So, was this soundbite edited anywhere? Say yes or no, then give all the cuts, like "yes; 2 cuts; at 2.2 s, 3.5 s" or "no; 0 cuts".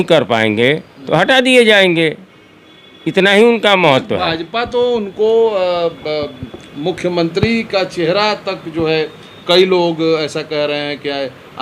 no; 0 cuts